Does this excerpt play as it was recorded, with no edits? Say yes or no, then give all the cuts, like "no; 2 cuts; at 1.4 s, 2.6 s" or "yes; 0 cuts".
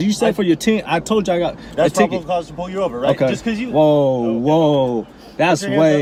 yes; 0 cuts